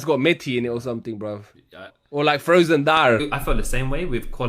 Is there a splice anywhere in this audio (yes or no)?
yes